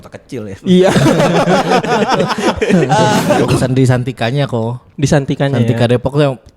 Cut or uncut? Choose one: cut